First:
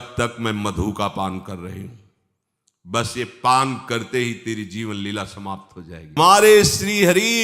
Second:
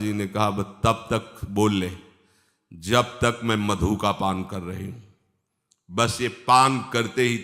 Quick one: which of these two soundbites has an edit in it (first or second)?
first